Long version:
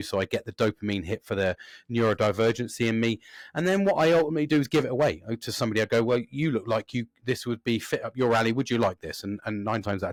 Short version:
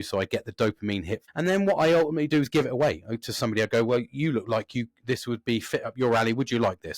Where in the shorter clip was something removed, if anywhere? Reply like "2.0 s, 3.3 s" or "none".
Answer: 1.2 s